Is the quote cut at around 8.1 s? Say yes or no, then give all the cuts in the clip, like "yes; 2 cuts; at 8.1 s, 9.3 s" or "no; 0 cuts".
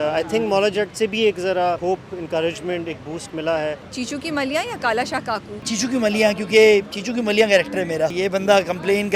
yes; 4 cuts; at 1.8 s, 3.9 s, 5.7 s, 8.1 s